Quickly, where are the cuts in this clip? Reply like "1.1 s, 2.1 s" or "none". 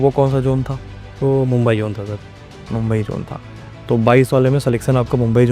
none

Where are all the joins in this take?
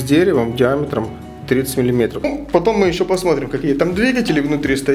2.2 s

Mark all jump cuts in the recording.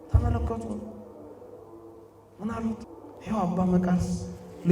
2.9 s

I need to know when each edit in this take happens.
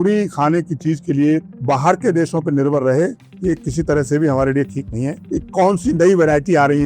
5.3 s

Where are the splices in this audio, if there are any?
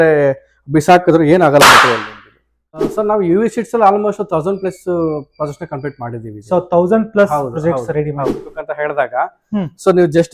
2.8 s, 8.4 s

